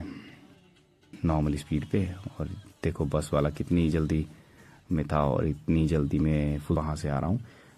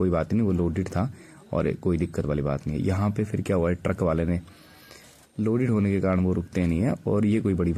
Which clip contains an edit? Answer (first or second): first